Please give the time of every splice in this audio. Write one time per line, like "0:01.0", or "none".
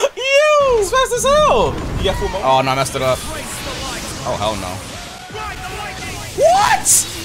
0:00.9
0:02.2